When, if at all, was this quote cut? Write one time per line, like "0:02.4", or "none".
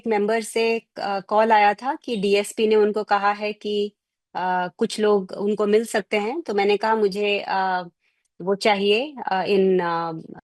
none